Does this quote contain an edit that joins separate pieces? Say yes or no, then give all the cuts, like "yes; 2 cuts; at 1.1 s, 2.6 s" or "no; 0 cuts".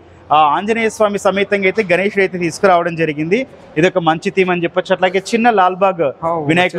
no; 0 cuts